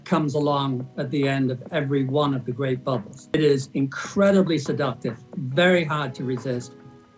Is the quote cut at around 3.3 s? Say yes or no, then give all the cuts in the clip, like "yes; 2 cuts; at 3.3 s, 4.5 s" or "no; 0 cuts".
yes; 1 cut; at 3.3 s